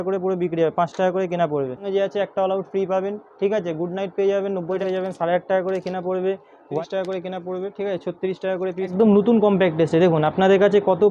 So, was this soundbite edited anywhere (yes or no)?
yes